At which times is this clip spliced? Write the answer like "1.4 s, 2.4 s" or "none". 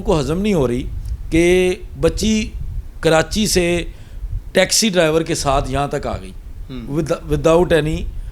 none